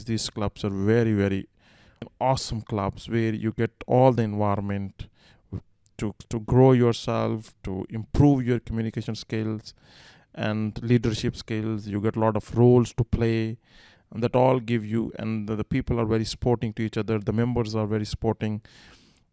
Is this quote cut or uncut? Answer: cut